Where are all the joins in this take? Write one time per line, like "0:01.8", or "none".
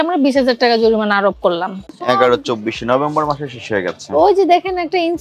0:01.8